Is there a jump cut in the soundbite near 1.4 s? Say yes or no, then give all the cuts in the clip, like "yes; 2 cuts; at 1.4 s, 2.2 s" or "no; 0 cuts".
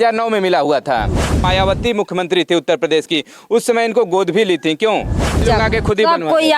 yes; 2 cuts; at 1.4 s, 5.4 s